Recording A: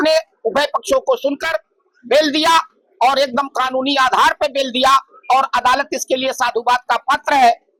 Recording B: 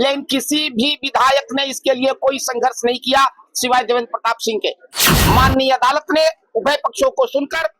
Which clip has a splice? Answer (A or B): B